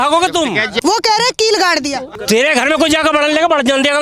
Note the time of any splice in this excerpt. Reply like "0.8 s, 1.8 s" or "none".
0.8 s, 2.2 s